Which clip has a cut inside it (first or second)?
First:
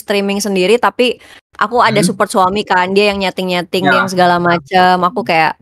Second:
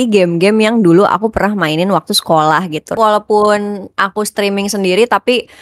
second